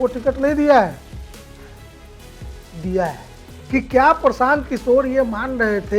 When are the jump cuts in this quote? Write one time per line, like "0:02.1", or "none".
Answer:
0:03.5